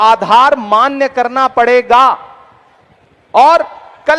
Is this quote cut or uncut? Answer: uncut